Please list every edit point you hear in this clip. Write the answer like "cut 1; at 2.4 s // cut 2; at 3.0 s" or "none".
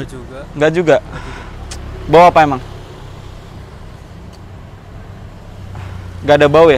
none